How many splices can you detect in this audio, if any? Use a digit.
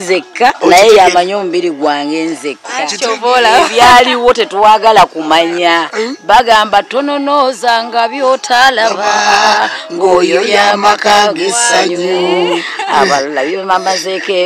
0